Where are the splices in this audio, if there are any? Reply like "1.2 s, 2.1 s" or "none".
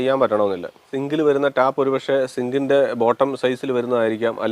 1.0 s